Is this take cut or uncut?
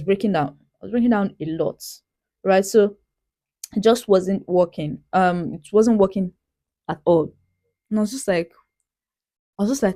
uncut